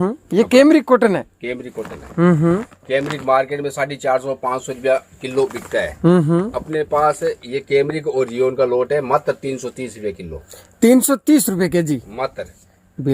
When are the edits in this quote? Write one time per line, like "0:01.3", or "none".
none

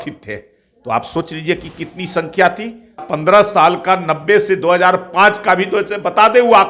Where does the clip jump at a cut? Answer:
0:03.0

